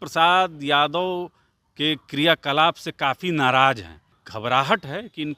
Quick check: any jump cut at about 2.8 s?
no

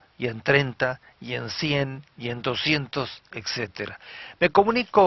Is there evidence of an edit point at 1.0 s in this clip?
no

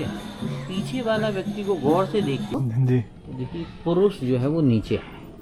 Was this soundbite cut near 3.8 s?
no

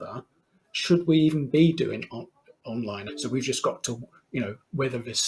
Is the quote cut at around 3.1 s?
yes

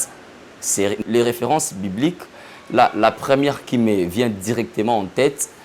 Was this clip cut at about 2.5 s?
no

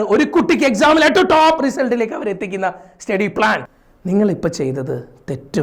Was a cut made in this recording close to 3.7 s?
yes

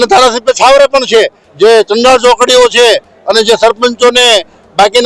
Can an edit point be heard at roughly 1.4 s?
yes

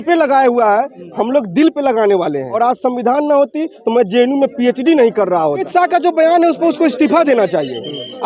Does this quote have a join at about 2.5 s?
yes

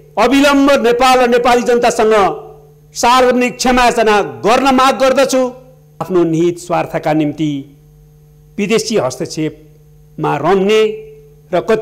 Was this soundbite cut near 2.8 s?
no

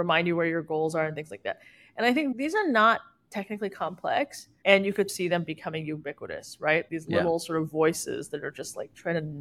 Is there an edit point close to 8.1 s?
no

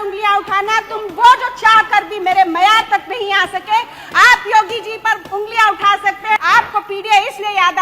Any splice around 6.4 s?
yes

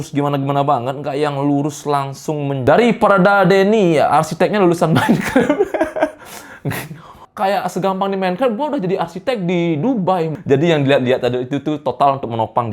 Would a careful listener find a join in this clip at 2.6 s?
yes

